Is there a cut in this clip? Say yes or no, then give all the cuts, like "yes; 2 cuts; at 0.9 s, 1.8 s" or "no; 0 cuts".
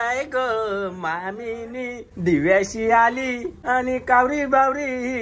yes; 2 cuts; at 2.1 s, 3.5 s